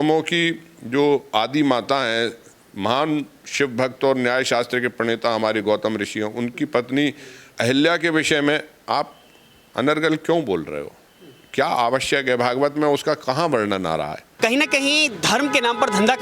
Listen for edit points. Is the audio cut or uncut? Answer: cut